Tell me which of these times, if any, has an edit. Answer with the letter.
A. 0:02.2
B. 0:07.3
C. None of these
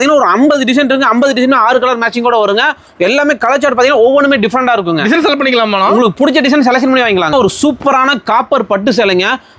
B